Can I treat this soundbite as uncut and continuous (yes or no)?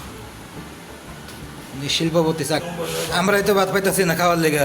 no